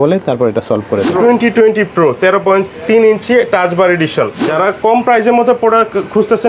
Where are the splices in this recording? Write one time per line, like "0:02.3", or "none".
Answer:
0:01.1